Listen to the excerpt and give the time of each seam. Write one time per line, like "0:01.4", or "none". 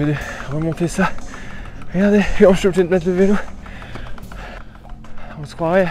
0:04.6